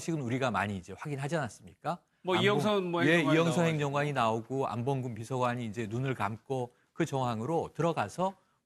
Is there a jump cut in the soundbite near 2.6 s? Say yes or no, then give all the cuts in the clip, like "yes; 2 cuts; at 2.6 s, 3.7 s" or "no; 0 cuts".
yes; 1 cut; at 2.6 s